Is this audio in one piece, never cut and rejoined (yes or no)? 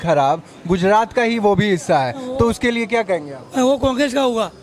yes